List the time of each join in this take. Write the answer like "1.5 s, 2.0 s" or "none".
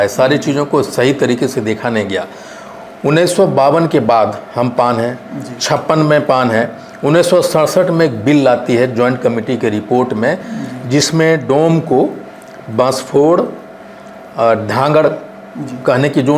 none